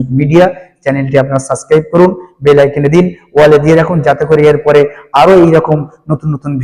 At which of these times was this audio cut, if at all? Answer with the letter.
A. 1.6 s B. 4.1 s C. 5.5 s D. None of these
D